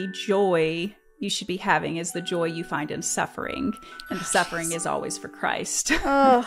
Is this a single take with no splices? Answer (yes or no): yes